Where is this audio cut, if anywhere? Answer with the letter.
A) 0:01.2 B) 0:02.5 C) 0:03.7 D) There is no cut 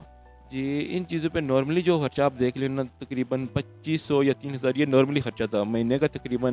D